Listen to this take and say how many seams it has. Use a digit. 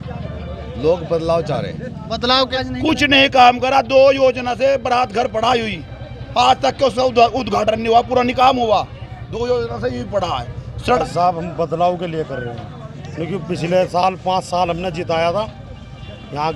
2